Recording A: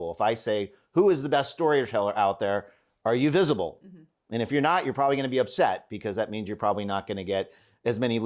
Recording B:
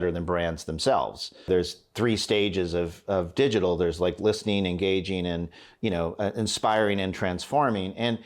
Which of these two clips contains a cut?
B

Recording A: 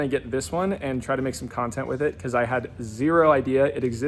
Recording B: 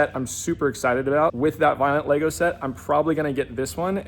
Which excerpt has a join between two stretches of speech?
B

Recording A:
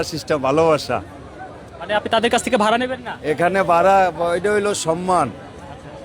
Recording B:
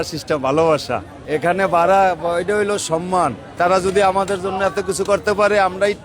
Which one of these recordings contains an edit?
B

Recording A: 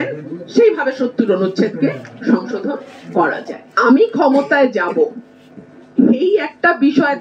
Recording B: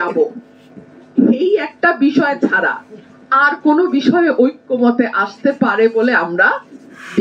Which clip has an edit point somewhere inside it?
A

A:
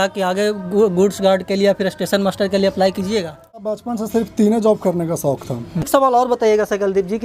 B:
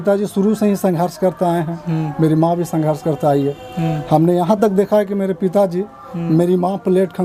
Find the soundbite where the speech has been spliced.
A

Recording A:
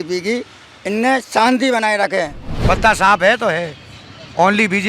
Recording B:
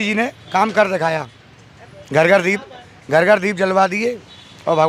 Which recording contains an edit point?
A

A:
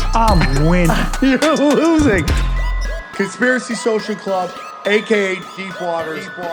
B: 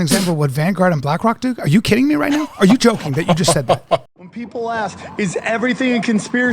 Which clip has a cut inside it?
B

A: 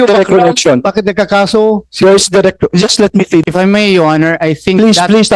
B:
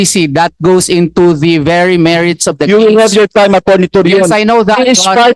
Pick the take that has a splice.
A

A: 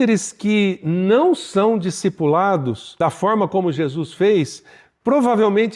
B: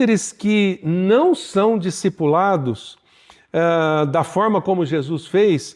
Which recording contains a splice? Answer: A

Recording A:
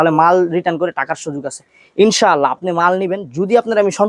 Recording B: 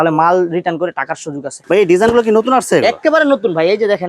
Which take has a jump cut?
B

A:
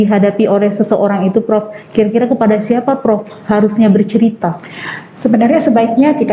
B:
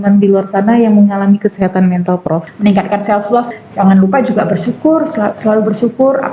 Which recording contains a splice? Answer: B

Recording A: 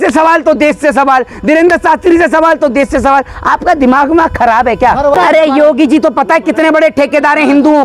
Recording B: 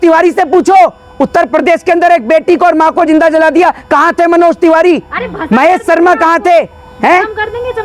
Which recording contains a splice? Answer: A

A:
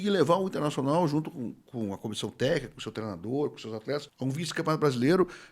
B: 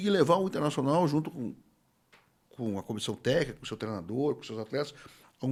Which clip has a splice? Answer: A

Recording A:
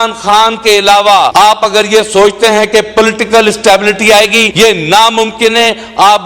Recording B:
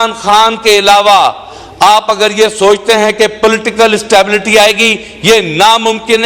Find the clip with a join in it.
A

